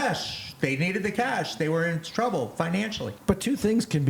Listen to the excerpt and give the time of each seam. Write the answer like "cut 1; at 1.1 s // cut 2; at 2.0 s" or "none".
none